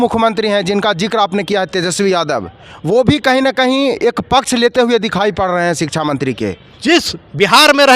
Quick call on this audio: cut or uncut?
cut